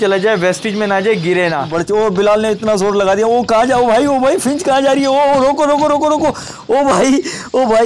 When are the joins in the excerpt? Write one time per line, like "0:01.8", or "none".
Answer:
0:01.7